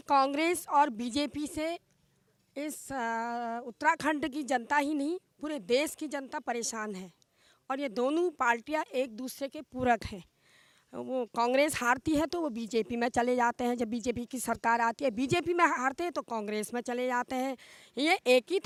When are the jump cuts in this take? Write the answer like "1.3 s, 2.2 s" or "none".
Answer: none